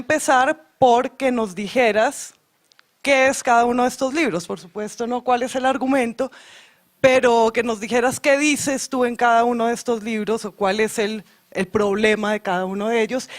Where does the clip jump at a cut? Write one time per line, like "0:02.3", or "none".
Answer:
0:07.6